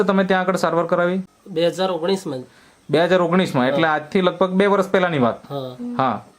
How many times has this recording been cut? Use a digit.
1